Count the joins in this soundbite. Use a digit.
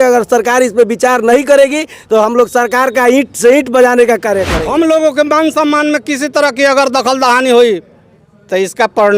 1